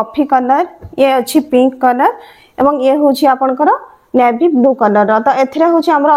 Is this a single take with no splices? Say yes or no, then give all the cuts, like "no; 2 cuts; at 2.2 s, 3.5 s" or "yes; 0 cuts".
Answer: yes; 0 cuts